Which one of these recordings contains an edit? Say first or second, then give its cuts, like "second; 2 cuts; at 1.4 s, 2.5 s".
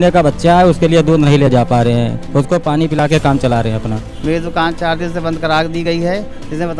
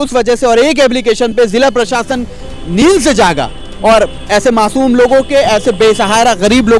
first; 1 cut; at 4.1 s